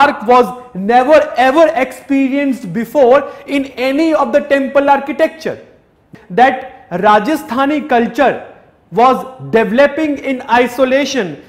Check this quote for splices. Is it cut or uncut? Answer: cut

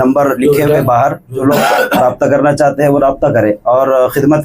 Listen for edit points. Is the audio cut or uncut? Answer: cut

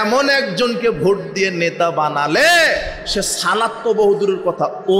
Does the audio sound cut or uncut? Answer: uncut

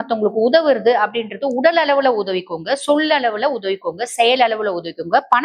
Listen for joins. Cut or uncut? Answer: uncut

